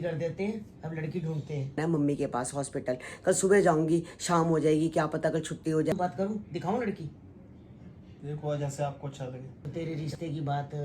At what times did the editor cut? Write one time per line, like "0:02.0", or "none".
0:01.8
0:05.9
0:09.5